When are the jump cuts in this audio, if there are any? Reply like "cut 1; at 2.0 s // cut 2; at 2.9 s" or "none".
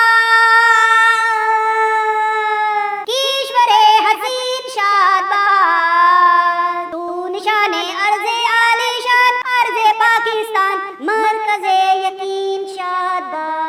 none